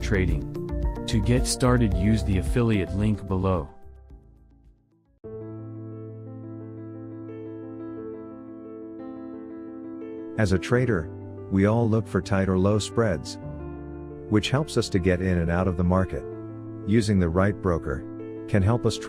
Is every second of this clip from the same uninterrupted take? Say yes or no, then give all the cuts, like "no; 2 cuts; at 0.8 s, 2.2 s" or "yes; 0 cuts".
yes; 0 cuts